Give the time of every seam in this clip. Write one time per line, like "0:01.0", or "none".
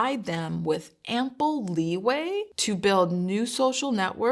0:02.5